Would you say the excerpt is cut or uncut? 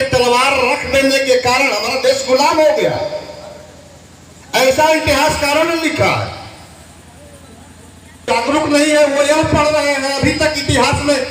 cut